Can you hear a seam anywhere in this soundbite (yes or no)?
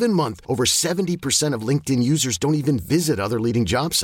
no